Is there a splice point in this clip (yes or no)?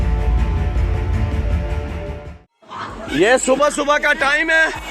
yes